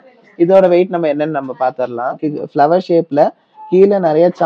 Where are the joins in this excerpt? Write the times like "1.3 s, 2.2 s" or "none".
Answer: 2.2 s